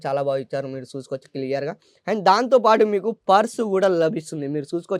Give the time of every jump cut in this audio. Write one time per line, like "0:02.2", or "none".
none